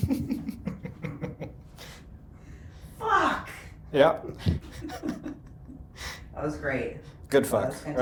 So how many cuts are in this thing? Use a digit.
0